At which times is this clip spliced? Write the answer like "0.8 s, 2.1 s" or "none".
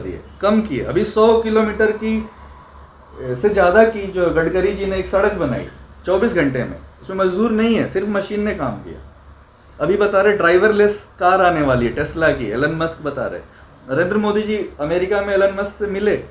none